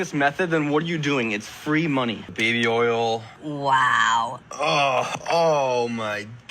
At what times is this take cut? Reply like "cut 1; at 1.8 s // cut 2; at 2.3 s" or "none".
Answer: cut 1; at 2.3 s // cut 2; at 4.4 s